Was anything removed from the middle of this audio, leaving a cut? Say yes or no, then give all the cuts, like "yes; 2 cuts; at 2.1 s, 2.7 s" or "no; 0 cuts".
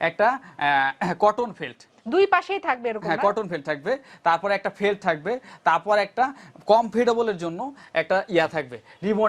no; 0 cuts